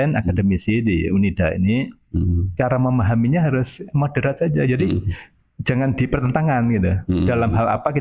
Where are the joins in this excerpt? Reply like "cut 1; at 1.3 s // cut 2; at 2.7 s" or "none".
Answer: none